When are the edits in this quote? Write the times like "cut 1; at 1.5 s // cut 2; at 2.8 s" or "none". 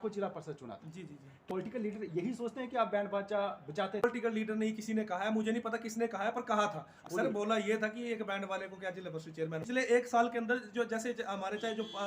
cut 1; at 1.4 s // cut 2; at 4.0 s // cut 3; at 7.0 s // cut 4; at 9.6 s